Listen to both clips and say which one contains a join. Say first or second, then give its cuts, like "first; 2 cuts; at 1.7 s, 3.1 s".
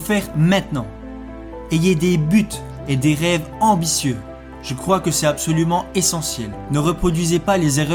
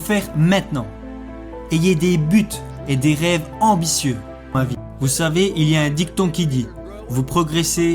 second; 1 cut; at 4.5 s